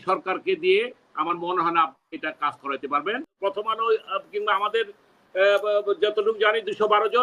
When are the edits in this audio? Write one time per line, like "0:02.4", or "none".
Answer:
0:03.4